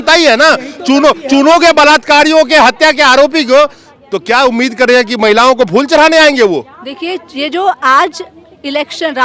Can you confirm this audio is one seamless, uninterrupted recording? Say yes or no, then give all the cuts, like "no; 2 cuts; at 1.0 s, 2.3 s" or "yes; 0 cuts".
yes; 0 cuts